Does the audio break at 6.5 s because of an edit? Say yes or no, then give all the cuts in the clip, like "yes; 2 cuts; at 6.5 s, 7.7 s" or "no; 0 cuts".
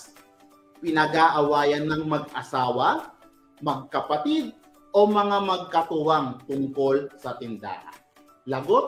no; 0 cuts